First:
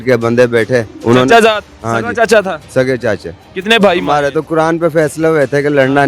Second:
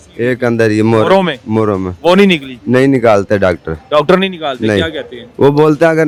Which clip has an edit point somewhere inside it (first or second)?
first